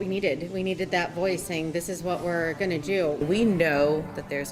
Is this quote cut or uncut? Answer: cut